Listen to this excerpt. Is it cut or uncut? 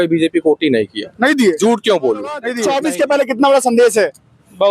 cut